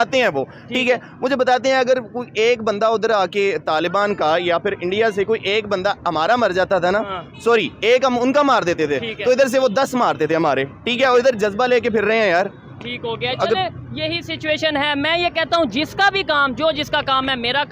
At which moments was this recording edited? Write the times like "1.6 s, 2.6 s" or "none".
none